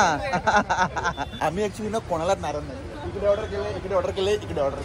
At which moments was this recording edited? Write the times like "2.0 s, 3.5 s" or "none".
1.2 s